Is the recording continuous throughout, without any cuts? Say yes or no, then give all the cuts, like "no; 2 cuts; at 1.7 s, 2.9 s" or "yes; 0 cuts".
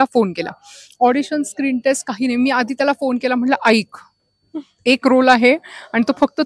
yes; 0 cuts